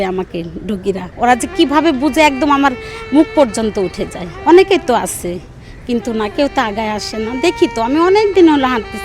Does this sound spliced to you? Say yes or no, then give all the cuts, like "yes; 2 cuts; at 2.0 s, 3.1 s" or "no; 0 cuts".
yes; 2 cuts; at 1.1 s, 4.3 s